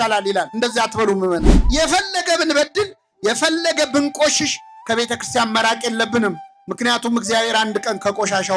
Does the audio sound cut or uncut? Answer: uncut